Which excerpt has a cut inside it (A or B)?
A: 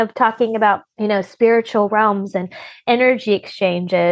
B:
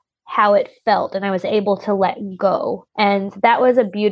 B